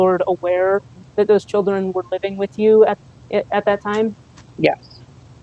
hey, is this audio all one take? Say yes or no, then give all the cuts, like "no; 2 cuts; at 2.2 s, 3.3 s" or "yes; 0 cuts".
yes; 0 cuts